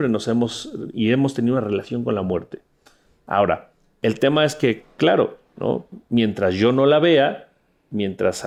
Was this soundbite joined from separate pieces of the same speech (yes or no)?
no